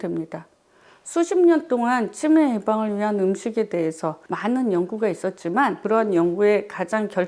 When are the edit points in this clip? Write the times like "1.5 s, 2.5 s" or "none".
4.3 s, 5.8 s